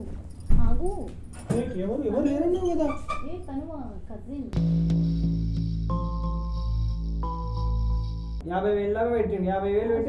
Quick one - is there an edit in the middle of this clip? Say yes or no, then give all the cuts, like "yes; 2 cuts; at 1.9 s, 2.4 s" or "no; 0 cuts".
yes; 1 cut; at 8.3 s